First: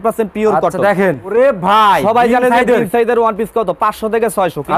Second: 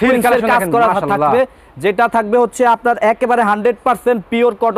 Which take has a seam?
first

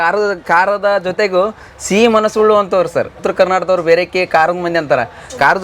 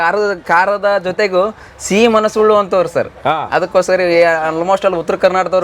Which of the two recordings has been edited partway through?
first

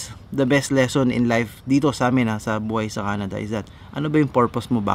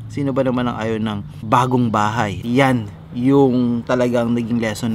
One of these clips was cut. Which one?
second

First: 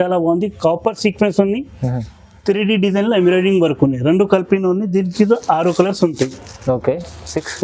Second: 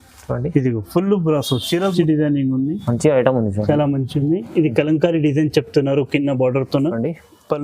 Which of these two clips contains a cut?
second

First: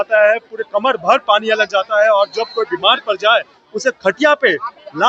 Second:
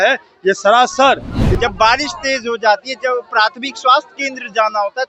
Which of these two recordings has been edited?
second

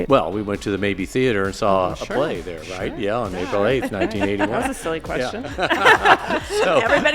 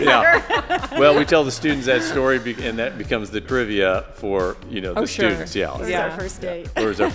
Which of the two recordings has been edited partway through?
second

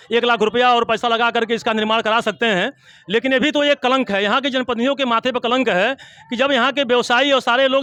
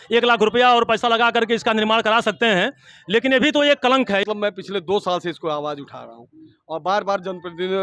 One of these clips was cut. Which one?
second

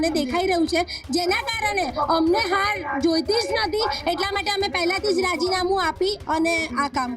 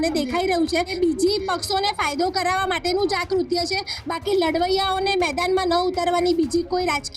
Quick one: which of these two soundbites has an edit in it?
second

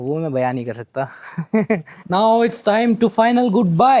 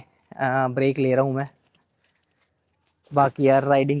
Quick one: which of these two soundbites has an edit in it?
first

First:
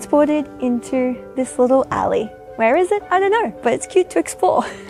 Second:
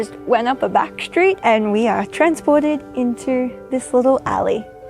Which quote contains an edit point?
second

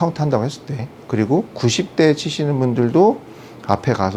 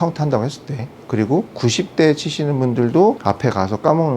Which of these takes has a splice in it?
second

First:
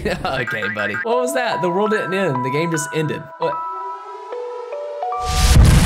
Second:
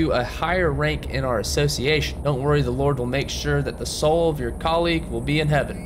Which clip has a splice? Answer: first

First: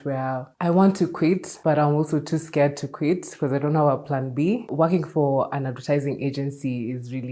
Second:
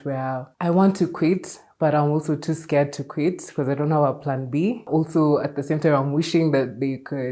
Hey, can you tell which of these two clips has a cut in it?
first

